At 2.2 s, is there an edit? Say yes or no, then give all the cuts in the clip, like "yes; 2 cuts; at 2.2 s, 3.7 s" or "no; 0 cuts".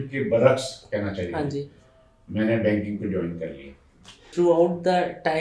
no; 1 cut; at 4.2 s